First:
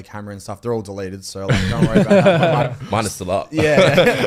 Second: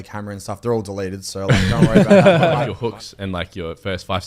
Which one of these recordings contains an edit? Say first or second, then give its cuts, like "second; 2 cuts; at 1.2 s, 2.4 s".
second; 1 cut; at 2.7 s